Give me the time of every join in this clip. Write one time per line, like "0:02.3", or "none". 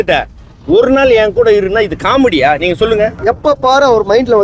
0:03.2